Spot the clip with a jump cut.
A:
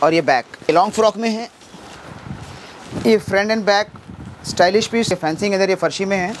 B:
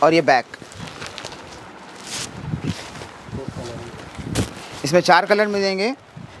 A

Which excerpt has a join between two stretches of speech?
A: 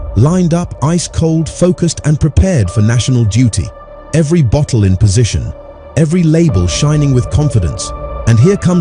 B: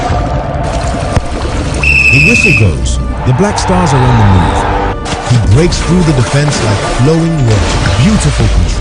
B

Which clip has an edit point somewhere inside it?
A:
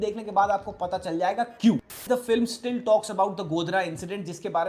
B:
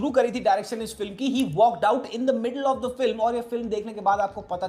A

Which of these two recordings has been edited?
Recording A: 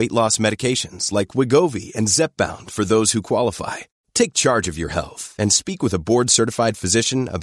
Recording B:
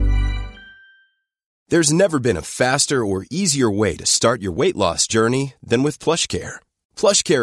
B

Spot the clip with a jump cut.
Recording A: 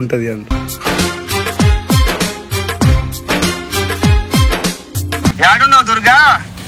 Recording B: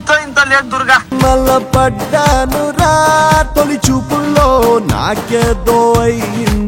A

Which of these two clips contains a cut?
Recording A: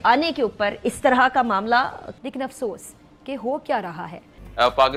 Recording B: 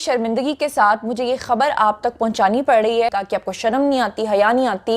B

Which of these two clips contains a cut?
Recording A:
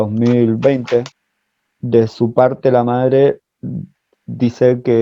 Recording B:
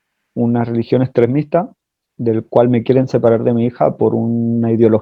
A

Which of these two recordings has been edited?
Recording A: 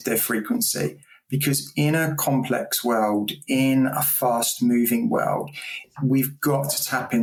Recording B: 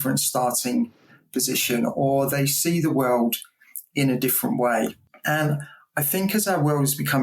B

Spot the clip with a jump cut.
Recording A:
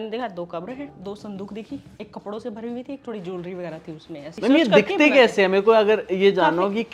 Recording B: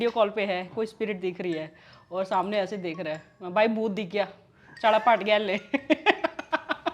A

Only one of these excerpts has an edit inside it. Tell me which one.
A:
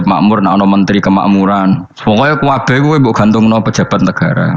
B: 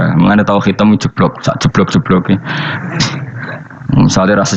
B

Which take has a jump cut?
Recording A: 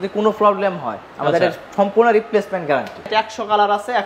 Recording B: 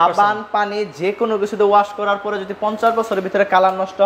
A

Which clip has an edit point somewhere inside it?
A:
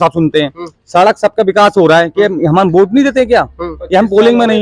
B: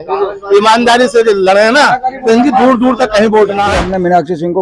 B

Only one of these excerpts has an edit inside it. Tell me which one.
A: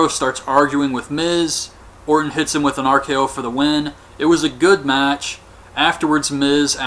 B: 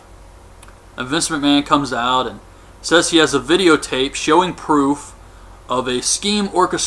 B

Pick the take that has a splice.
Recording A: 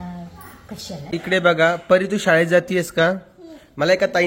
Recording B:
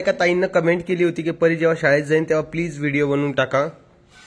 A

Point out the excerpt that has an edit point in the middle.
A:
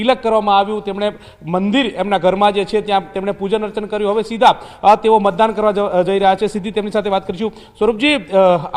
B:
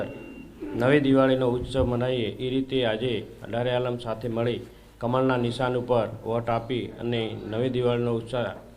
B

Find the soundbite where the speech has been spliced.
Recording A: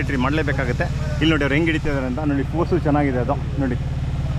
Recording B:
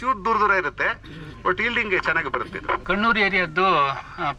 B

